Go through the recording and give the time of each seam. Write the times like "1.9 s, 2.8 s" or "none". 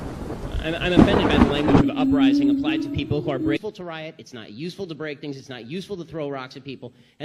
none